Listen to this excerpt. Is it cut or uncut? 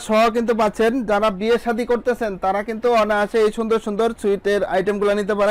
uncut